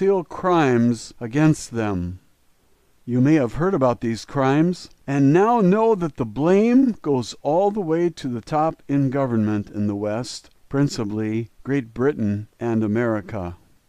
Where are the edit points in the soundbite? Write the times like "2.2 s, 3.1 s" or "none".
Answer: none